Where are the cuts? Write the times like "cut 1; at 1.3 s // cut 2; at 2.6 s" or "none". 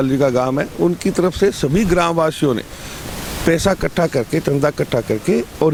none

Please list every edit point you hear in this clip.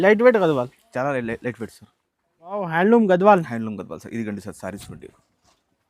cut 1; at 2.7 s

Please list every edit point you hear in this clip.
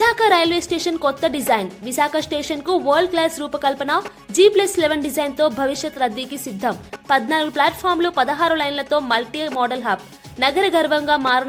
none

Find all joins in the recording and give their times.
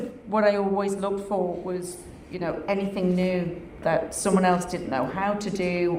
none

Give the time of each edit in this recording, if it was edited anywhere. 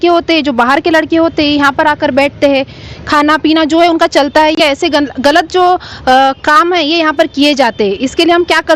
none

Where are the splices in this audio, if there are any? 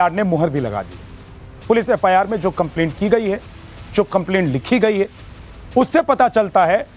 none

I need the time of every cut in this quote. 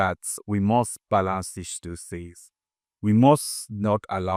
none

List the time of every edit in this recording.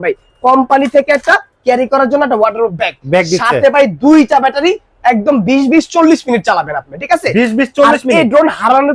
none

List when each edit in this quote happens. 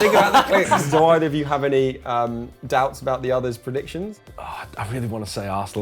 cut 1; at 0.8 s // cut 2; at 4.2 s

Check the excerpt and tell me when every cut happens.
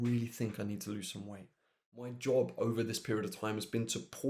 cut 1; at 2.1 s

